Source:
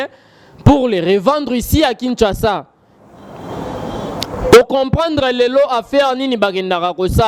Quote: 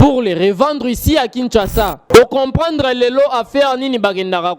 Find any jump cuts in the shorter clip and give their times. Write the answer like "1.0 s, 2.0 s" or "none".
2.0 s